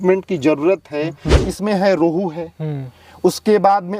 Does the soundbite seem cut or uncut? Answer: cut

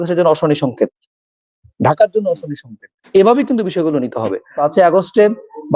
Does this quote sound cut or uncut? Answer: cut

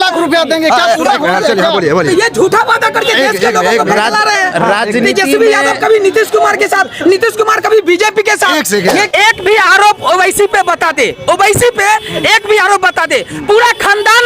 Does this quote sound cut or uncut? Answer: cut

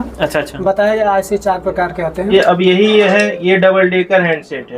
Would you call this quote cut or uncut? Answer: cut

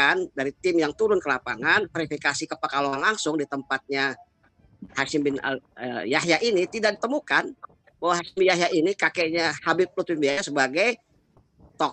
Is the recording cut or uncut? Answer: uncut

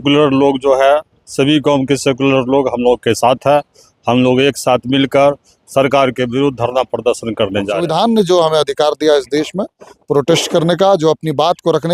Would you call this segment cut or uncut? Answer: cut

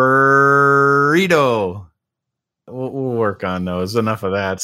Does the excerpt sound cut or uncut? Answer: cut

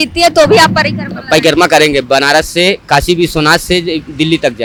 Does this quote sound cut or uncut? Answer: uncut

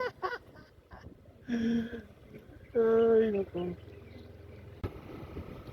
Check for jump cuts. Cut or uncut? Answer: cut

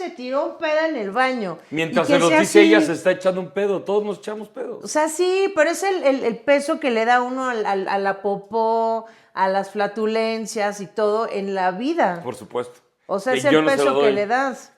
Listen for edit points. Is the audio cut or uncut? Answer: uncut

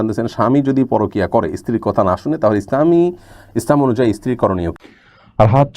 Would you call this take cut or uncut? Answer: cut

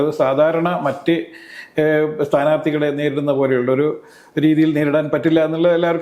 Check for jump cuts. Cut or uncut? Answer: uncut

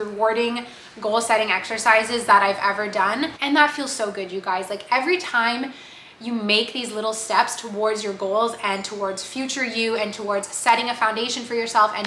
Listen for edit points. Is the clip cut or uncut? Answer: cut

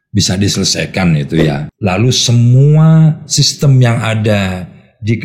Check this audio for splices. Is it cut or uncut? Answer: cut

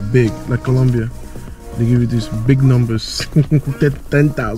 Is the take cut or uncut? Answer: uncut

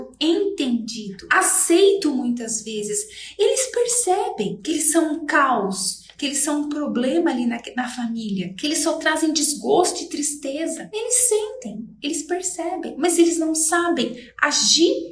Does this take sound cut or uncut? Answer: uncut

